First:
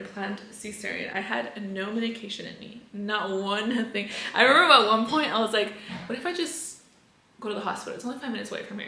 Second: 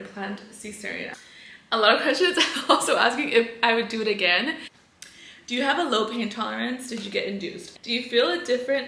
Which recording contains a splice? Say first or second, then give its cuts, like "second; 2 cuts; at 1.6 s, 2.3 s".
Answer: second; 3 cuts; at 1.1 s, 4.7 s, 7.6 s